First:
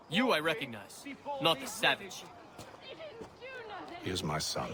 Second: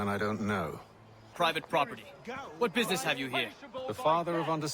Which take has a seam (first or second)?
second